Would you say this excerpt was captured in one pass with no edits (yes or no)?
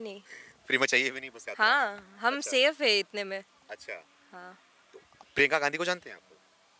yes